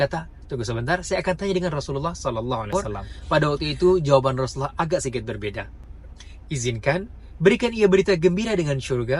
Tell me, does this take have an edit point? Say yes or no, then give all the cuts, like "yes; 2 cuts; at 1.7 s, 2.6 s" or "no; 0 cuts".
yes; 1 cut; at 2.7 s